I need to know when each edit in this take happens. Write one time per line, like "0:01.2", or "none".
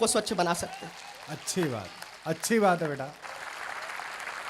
0:03.1

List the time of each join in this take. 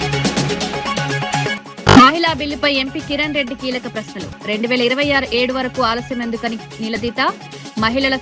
0:01.6

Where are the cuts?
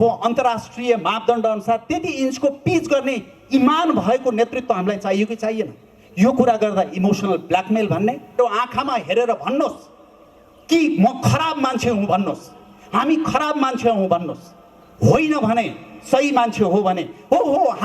0:08.4

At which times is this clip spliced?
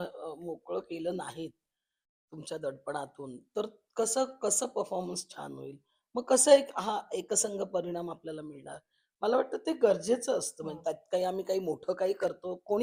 none

